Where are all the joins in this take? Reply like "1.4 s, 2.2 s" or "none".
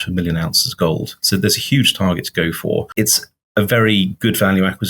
2.9 s